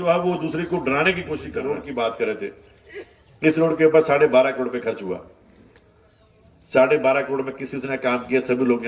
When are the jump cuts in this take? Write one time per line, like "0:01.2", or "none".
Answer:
0:01.6